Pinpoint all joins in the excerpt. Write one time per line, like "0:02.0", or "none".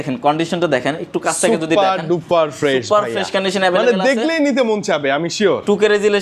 none